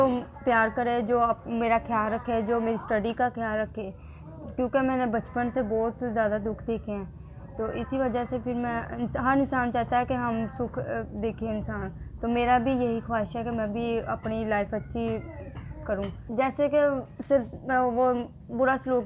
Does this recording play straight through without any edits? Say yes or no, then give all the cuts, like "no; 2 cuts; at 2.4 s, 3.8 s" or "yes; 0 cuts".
no; 1 cut; at 16.2 s